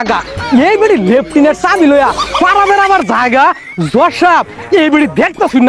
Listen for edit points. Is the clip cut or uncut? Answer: uncut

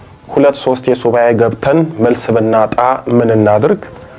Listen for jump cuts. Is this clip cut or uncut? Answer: uncut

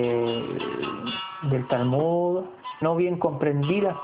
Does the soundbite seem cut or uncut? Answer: uncut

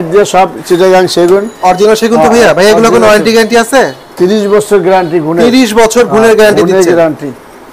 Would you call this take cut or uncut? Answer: uncut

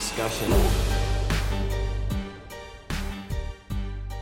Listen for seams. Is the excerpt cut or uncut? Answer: uncut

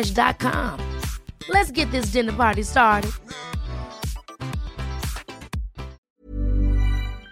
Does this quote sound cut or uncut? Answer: cut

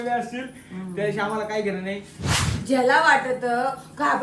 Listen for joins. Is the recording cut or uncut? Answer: cut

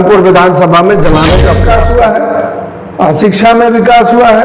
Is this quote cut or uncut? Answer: cut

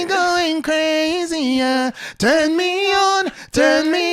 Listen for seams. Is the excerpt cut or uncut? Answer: uncut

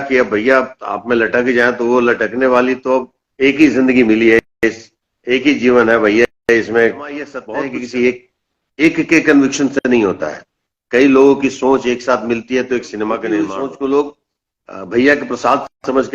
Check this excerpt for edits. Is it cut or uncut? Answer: cut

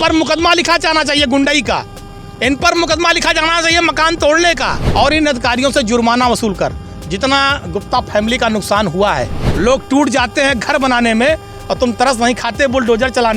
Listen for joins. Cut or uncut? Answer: cut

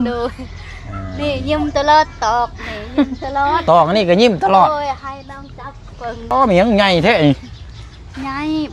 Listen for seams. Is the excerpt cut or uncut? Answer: cut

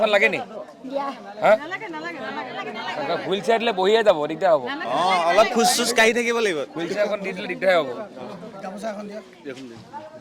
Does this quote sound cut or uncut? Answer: uncut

